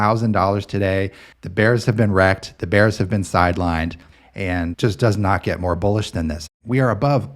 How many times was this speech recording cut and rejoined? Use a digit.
2